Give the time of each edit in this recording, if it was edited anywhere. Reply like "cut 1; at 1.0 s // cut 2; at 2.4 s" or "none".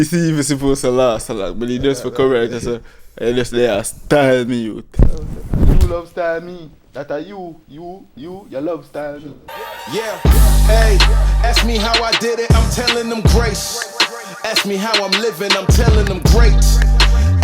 cut 1; at 4.9 s // cut 2; at 9.8 s